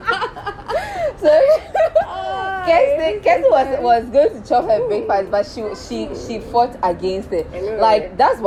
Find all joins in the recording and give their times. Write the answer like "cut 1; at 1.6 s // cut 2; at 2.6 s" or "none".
none